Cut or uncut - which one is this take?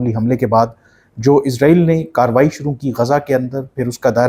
uncut